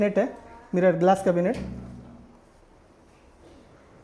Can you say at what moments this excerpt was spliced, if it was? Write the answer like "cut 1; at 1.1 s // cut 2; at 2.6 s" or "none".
none